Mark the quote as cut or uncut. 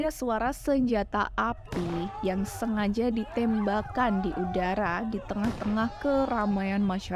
uncut